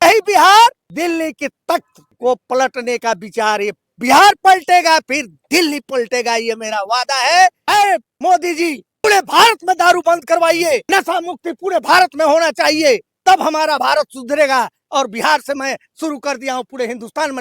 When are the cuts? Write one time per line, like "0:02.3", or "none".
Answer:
0:00.8
0:02.0
0:07.8
0:09.0
0:10.8
0:13.1